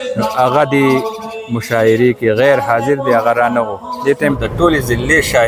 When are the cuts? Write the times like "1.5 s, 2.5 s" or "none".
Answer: 4.4 s